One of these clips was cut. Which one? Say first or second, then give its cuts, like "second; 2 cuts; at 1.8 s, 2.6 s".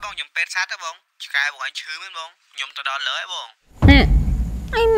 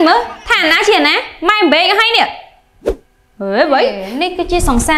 second; 1 cut; at 4.1 s